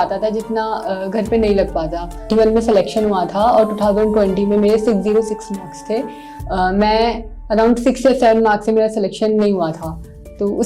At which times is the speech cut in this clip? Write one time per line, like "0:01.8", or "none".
0:02.3

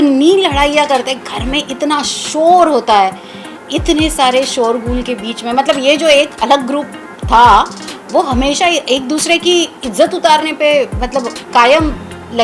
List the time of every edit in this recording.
none

